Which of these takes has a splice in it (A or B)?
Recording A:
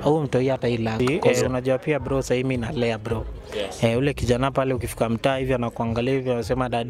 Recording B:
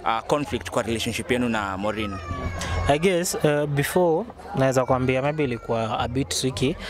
A